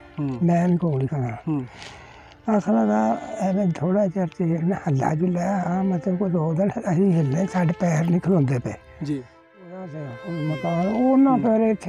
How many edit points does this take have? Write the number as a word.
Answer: one